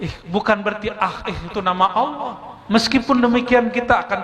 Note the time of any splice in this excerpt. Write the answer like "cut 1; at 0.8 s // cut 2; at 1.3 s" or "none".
cut 1; at 2.5 s